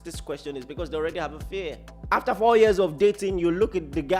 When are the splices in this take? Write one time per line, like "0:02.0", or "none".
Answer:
0:01.9